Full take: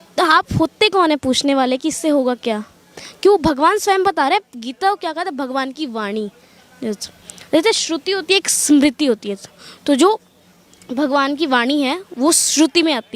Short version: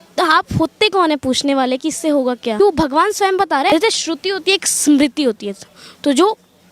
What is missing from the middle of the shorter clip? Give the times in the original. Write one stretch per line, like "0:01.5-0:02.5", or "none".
0:02.6-0:03.3
0:04.4-0:07.5